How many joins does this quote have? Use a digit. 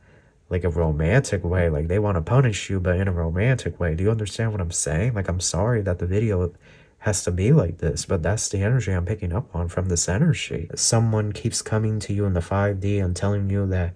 1